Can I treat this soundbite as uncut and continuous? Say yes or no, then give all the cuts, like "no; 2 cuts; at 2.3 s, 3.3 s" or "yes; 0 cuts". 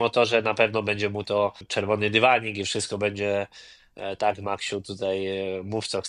no; 1 cut; at 1.7 s